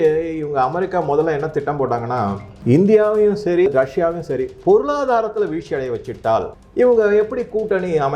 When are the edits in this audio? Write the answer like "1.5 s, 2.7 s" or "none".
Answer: 3.7 s